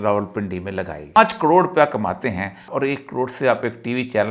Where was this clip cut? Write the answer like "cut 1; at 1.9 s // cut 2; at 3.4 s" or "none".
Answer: cut 1; at 1.2 s // cut 2; at 2.7 s